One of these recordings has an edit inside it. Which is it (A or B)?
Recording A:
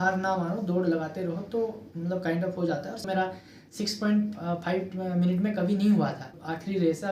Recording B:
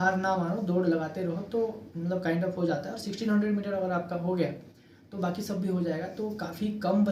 A